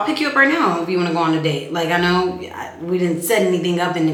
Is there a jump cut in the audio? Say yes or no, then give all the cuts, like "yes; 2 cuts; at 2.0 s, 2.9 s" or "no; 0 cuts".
no; 0 cuts